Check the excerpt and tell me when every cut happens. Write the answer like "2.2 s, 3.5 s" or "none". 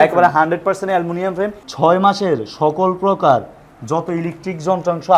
1.6 s